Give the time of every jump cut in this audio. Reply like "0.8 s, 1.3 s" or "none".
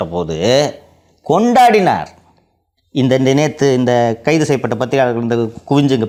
none